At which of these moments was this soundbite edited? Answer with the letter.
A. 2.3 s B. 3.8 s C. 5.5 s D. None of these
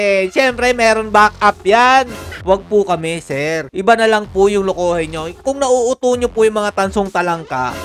A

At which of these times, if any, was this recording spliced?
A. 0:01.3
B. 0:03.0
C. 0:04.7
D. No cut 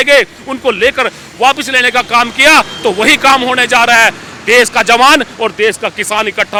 D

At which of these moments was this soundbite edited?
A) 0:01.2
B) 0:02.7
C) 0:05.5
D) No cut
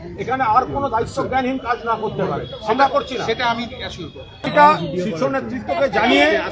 D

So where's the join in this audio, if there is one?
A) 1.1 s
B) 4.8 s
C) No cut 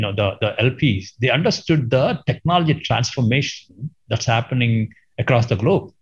C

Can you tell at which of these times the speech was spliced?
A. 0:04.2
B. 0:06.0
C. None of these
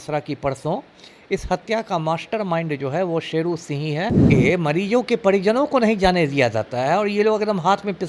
A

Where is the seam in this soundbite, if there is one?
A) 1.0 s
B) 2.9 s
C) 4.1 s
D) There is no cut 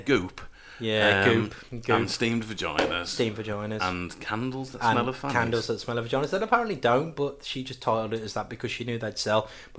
D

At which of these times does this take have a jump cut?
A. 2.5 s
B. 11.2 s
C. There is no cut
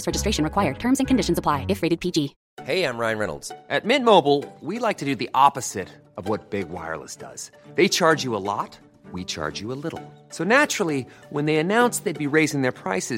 A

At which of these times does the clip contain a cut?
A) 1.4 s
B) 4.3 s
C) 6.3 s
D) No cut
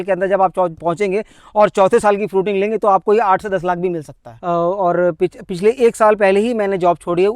B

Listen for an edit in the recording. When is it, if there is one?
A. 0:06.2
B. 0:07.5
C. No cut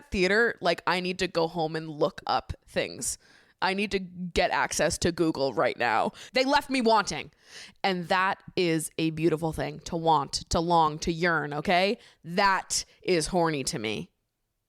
A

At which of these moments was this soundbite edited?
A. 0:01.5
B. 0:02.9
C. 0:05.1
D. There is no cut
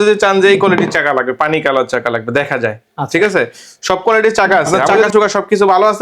C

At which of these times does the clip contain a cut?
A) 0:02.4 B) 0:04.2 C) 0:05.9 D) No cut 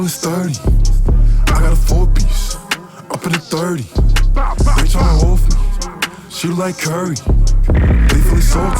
D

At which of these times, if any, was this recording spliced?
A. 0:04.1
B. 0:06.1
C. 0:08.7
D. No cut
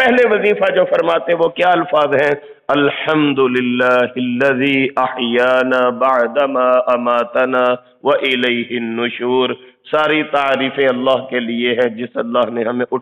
D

